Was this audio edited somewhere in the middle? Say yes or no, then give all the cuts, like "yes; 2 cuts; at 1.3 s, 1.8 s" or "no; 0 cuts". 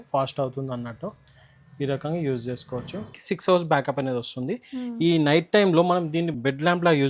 yes; 2 cuts; at 3.2 s, 6.3 s